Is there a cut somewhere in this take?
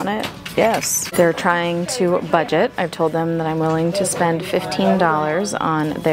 yes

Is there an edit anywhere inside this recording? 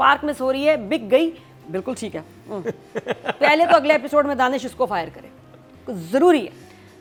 no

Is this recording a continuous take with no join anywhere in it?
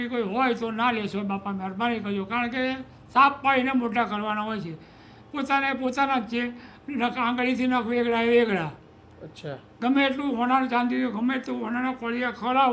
yes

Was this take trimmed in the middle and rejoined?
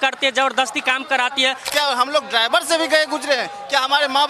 yes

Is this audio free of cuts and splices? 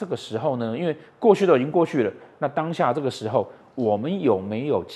yes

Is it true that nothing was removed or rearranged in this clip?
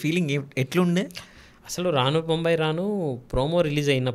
yes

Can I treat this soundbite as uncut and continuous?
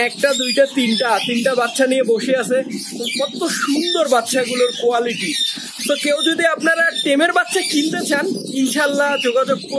yes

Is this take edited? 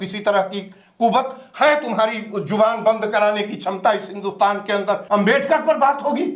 yes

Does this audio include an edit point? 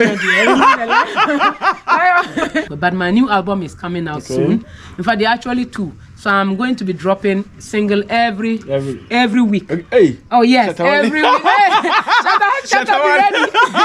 yes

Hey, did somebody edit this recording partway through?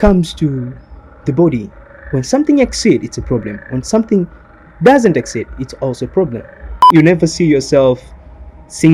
yes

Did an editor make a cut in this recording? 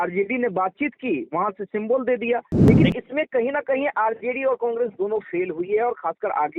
yes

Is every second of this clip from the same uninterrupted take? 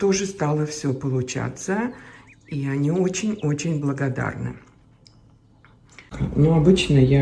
no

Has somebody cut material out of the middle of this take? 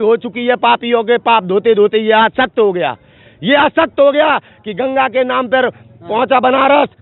no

